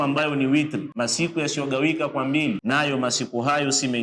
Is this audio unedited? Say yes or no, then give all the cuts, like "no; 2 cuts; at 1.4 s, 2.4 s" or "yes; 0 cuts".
no; 2 cuts; at 0.9 s, 2.6 s